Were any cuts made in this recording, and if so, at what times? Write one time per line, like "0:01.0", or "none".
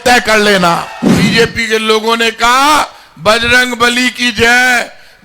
0:01.3